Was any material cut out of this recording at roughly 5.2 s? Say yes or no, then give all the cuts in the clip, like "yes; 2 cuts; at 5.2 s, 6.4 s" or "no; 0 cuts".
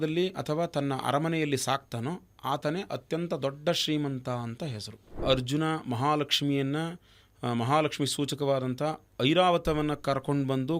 yes; 1 cut; at 5.2 s